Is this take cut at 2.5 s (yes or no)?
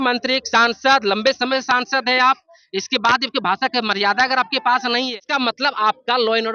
no